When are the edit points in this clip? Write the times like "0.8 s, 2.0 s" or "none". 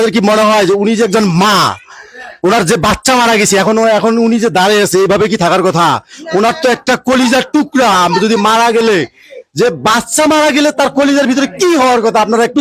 none

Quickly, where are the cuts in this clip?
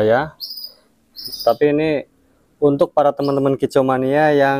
1.1 s

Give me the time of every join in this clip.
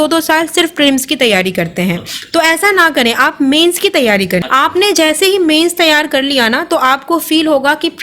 4.4 s

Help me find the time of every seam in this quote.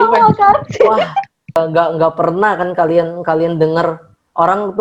1.5 s

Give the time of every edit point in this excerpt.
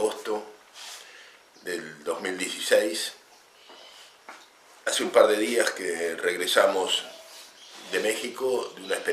none

